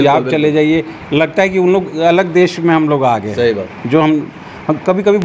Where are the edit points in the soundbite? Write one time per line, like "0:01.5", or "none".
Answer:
none